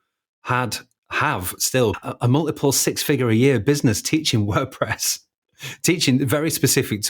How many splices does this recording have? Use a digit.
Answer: 1